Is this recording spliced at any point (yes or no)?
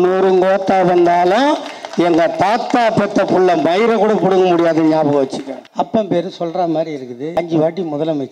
yes